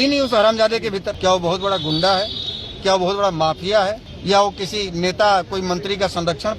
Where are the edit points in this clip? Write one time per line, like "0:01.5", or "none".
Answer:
0:01.1
0:04.1